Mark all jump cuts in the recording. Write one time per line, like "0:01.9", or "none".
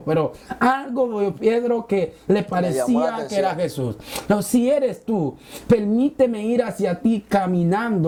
none